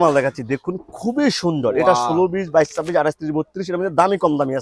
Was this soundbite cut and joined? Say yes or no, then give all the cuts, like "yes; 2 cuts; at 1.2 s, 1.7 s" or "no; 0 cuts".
no; 0 cuts